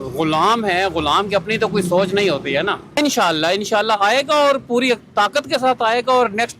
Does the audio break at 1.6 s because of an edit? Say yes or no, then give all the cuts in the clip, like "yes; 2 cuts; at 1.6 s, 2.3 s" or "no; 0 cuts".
no; 1 cut; at 3.0 s